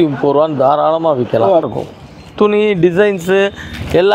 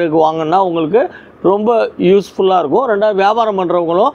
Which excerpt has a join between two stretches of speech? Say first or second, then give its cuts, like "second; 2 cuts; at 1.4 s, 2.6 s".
first; 1 cut; at 1.7 s